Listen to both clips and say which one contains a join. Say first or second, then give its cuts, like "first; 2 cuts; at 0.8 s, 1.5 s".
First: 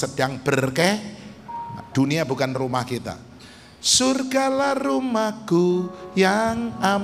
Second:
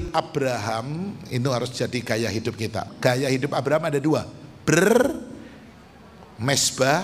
second; 1 cut; at 2.9 s